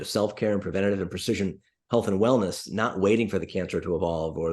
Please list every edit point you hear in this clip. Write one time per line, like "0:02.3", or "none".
none